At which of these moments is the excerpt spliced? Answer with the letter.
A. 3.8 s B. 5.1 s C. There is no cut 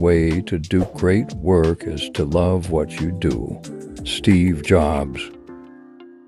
B